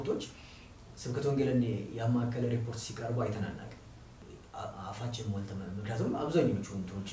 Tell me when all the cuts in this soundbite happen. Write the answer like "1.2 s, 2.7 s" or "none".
none